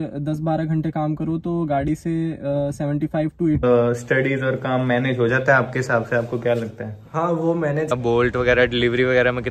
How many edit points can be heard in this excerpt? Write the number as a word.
two